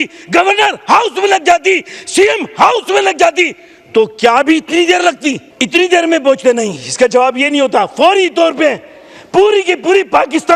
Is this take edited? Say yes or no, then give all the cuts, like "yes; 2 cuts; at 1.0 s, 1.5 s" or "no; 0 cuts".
yes; 1 cut; at 5.5 s